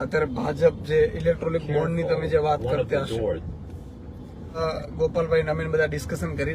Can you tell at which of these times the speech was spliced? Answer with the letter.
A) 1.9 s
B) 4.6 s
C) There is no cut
B